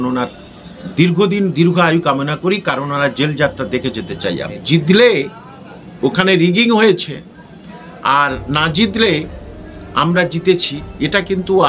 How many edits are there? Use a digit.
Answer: 1